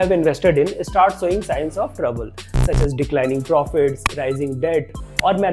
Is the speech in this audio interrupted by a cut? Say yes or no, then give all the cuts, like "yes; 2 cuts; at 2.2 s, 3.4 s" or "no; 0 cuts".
no; 0 cuts